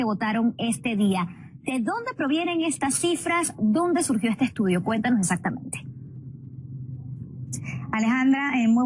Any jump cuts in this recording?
yes; 1 cut; at 4.1 s

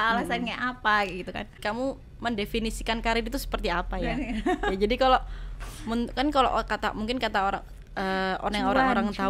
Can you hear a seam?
yes; 1 cut; at 1.6 s

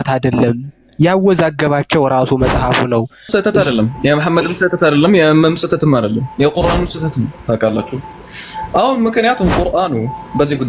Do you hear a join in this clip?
yes; 1 cut; at 3.3 s

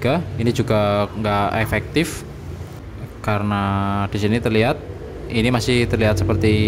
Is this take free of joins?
yes; 0 cuts

